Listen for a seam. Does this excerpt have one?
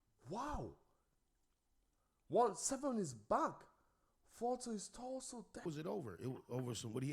yes; 1 cut; at 5.6 s

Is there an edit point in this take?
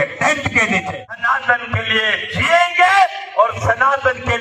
yes; 1 cut; at 1.0 s

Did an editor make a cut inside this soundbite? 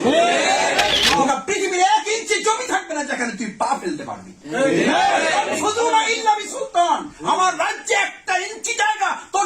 yes; 1 cut; at 1.2 s

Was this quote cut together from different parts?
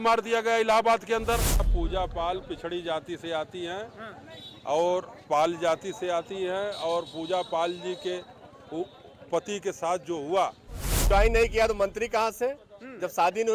yes; 2 cuts; at 1.6 s, 11.0 s

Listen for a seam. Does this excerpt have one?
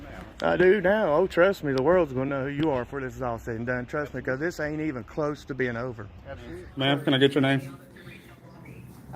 yes; 1 cut; at 6.7 s

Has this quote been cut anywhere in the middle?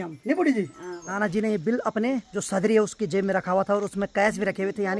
yes; 2 cuts; at 1.2 s, 2.3 s

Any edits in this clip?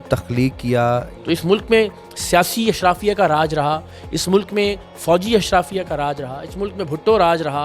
yes; 1 cut; at 1.1 s

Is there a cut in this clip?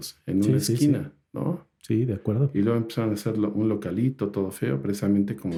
no; 0 cuts

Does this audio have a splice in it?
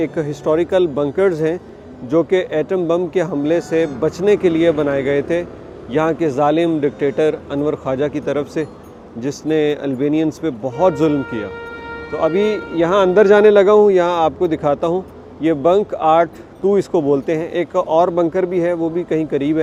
no; 0 cuts

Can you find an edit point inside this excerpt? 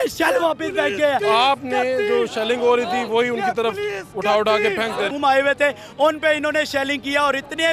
yes; 1 cut; at 5.1 s

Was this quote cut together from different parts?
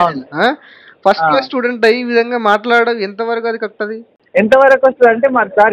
no; 0 cuts

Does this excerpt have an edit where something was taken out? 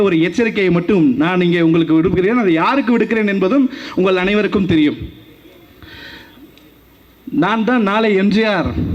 no; 0 cuts

